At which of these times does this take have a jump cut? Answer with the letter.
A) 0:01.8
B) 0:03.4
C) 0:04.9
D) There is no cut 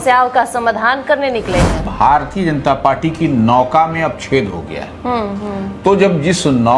A